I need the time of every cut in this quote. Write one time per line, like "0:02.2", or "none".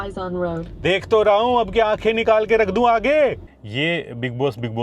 0:03.5